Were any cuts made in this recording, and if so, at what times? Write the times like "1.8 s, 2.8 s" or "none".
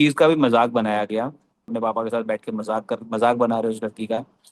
1.7 s

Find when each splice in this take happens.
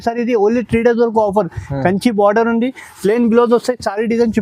none

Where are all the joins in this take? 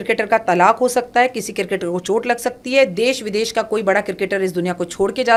none

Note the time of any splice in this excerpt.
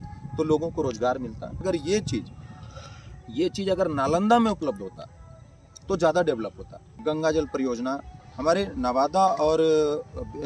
1.6 s, 6.9 s

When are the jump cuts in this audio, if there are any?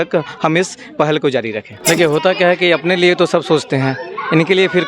1.7 s

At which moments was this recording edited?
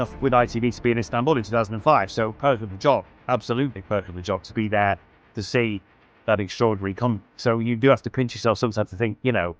none

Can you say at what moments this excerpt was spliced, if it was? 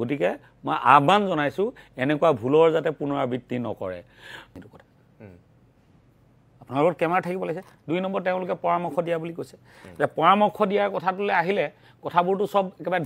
4.5 s

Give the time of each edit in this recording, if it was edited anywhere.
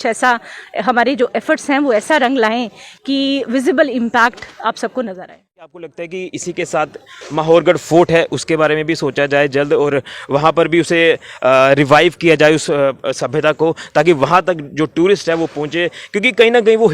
5.7 s

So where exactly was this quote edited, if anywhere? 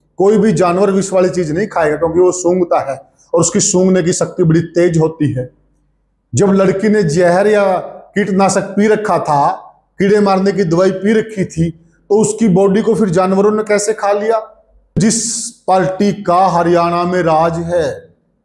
15.0 s

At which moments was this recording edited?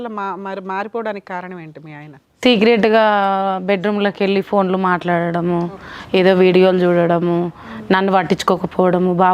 none

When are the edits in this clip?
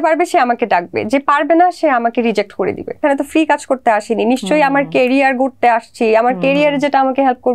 3.0 s

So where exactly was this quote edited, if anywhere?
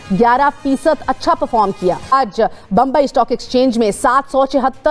2.1 s

